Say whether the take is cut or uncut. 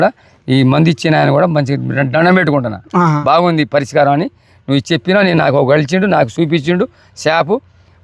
uncut